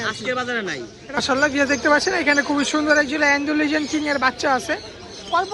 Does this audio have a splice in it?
yes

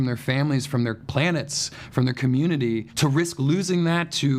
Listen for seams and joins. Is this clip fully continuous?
no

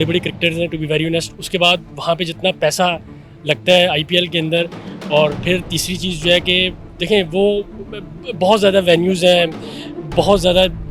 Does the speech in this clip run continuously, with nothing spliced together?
yes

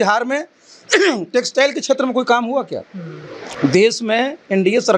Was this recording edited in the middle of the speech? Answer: no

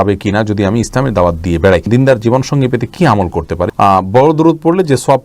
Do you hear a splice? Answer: yes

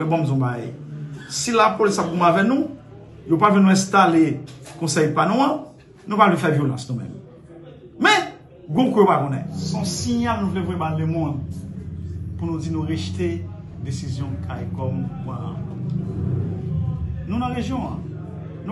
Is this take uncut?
no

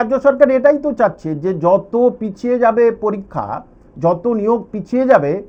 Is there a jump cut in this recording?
no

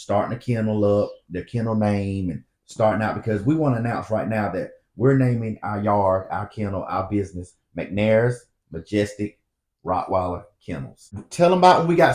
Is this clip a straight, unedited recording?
no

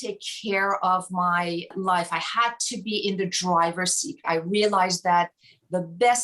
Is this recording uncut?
no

